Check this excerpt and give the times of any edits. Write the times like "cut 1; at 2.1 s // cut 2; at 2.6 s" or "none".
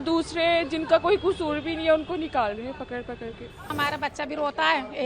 cut 1; at 3.7 s